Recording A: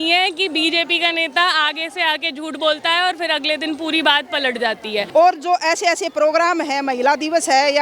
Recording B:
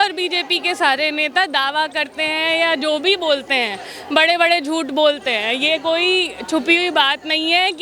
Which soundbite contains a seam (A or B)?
A